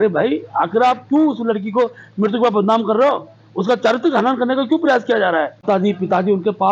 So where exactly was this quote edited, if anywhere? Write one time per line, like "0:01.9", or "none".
0:05.5